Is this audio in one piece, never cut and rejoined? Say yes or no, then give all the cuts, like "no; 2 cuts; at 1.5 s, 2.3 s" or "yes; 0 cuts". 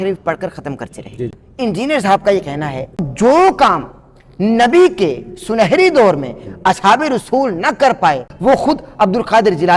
no; 3 cuts; at 1.4 s, 3.1 s, 8.3 s